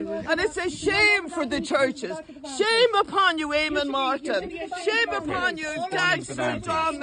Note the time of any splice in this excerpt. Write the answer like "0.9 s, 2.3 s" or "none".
none

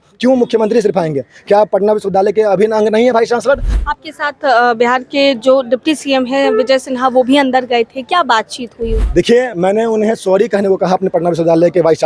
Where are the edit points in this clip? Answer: 3.7 s, 9.0 s

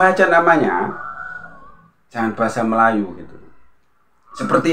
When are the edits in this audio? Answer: none

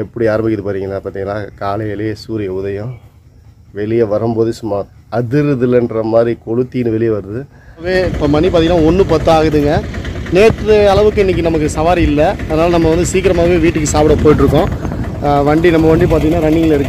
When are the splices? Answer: 7.9 s

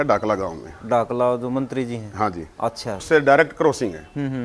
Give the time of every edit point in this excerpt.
3.0 s

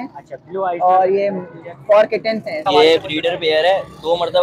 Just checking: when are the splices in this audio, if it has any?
2.6 s

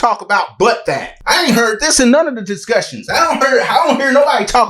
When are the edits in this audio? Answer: 1.1 s

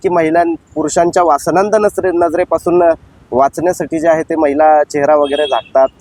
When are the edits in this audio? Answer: none

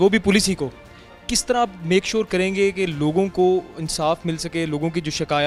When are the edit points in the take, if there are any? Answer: none

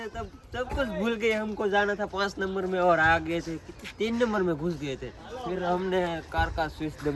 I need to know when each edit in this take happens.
none

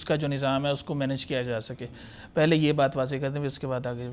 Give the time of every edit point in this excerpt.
none

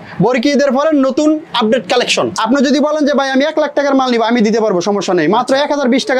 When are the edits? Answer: 2.4 s

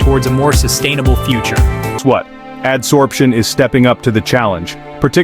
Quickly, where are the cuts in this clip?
2.0 s

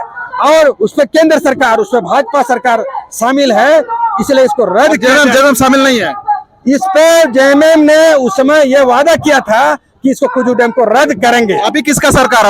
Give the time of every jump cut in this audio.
none

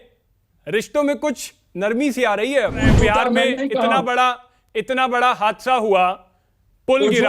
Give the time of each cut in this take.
2.8 s

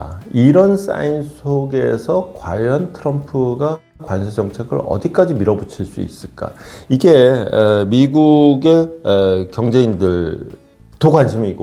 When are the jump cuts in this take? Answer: none

